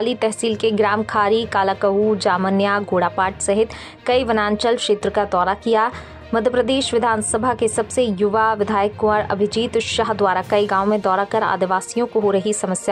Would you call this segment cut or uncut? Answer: uncut